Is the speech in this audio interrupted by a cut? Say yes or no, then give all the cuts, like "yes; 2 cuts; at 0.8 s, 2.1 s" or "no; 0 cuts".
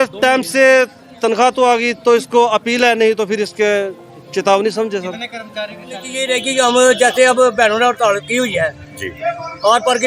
yes; 1 cut; at 6.2 s